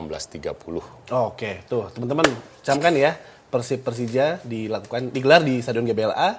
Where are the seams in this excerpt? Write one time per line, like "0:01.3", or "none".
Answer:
none